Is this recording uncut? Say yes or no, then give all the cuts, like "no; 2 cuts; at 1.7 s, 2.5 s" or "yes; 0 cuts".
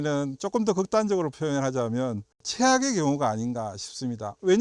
no; 1 cut; at 2.4 s